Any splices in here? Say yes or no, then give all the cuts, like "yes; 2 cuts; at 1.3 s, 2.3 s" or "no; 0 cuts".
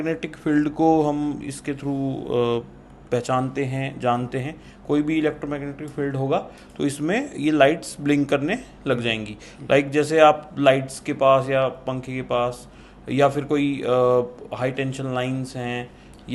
no; 0 cuts